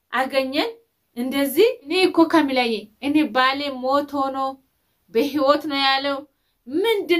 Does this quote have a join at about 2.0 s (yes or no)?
yes